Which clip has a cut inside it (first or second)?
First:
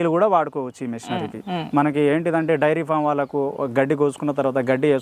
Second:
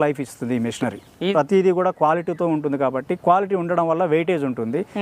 second